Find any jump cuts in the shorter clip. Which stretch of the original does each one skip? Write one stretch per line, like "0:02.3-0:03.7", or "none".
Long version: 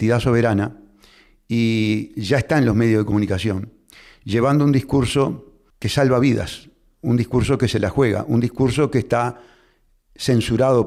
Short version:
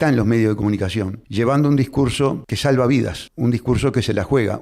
0:03.7-0:04.1
0:05.4-0:05.8
0:06.6-0:06.9

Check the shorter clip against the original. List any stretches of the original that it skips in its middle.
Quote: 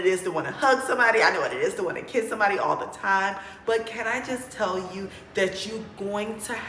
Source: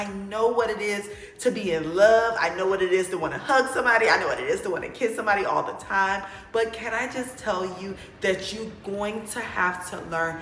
none

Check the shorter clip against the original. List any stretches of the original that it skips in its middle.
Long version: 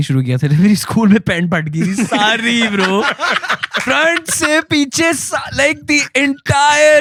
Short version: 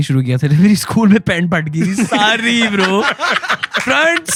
none

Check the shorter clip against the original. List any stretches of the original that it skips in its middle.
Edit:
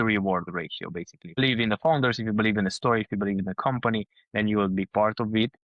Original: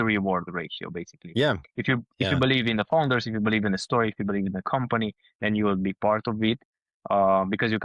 0:01.4-0:02.5

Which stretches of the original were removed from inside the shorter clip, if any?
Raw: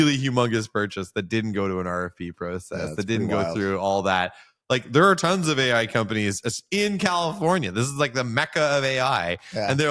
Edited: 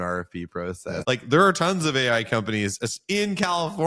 0:02.9-0:04.6

